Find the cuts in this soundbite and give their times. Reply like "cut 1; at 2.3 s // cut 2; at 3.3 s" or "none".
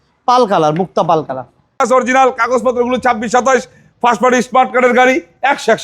cut 1; at 1.8 s